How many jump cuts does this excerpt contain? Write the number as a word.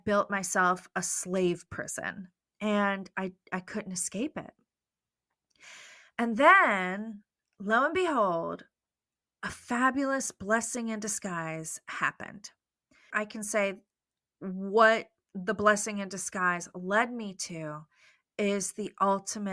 one